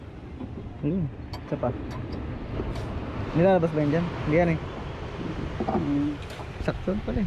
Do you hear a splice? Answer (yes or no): no